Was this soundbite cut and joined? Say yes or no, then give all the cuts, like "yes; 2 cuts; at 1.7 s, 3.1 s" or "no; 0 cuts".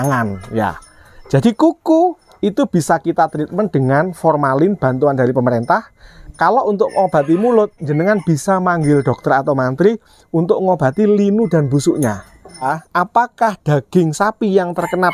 yes; 1 cut; at 12.8 s